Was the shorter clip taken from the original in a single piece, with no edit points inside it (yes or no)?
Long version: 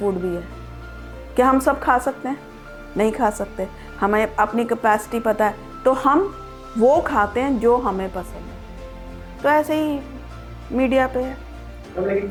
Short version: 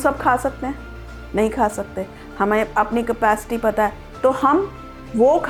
yes